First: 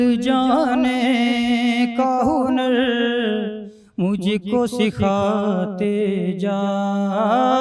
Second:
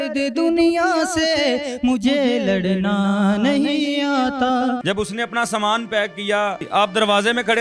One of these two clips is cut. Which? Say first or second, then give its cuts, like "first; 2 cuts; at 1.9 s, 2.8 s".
second; 2 cuts; at 4.8 s, 6.6 s